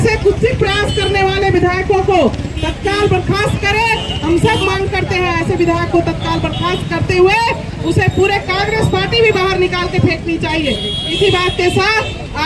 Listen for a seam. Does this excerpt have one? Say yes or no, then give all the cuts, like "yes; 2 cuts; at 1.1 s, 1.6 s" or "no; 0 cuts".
no; 0 cuts